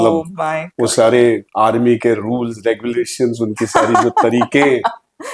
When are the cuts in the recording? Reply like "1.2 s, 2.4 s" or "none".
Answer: 1.5 s